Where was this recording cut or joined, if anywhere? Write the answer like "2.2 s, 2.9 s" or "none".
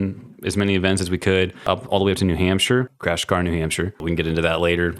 1.7 s, 2.9 s, 4.0 s

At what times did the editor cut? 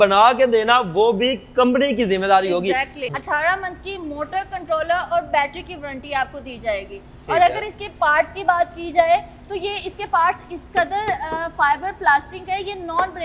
3.0 s

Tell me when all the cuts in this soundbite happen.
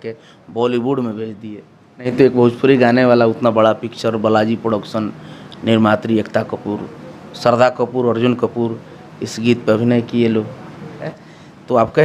2.1 s, 11.1 s

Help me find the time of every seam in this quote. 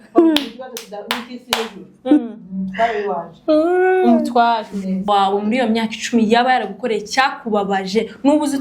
5.1 s

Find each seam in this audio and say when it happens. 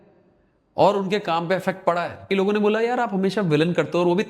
2.3 s

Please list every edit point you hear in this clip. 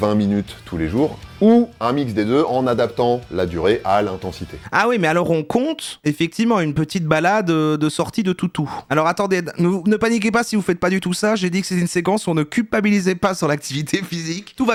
none

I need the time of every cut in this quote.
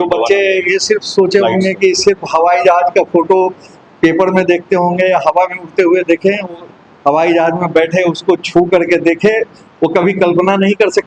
none

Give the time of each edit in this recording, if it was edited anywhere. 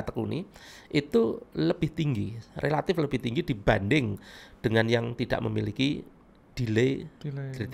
none

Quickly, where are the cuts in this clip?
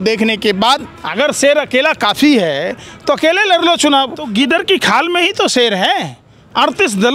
1.0 s, 4.3 s

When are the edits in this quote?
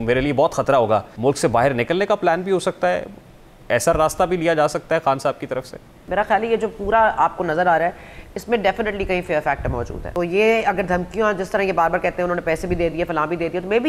1.1 s, 6.0 s, 10.0 s

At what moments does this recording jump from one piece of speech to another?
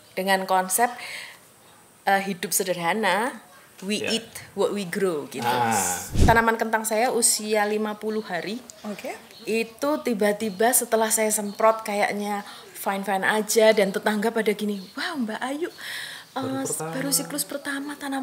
6.0 s

